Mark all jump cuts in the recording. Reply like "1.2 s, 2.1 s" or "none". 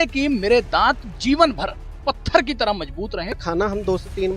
3.4 s